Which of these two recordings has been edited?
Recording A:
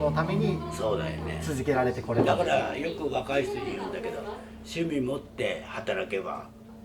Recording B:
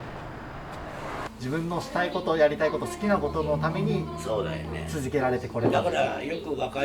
B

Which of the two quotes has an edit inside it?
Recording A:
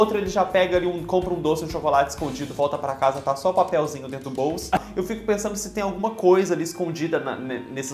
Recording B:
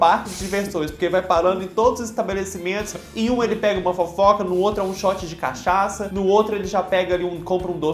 A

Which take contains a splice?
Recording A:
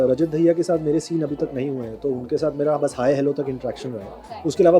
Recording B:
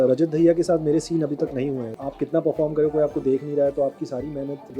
B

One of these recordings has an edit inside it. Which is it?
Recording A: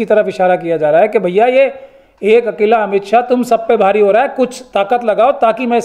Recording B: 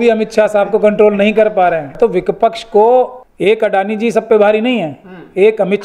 B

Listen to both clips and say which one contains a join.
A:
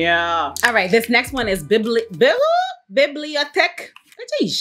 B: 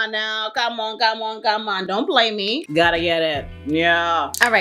B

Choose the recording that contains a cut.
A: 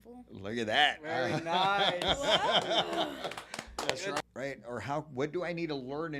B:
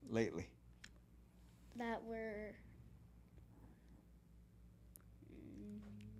A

